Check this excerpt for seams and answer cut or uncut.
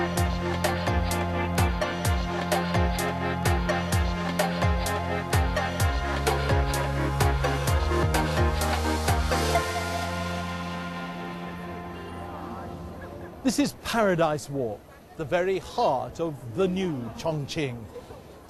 uncut